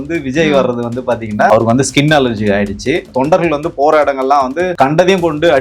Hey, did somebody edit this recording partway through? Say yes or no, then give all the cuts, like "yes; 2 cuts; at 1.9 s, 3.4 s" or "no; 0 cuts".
yes; 3 cuts; at 1.5 s, 3.1 s, 4.7 s